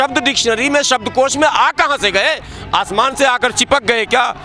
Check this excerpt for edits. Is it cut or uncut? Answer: uncut